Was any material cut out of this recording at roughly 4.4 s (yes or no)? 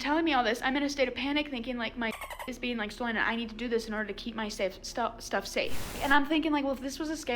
no